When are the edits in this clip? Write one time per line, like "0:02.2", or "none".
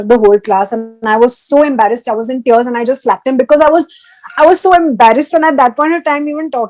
none